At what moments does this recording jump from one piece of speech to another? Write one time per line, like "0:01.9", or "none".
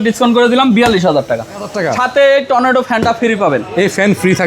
0:01.7